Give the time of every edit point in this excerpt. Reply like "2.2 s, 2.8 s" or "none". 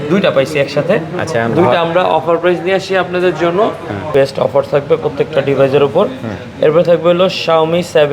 4.1 s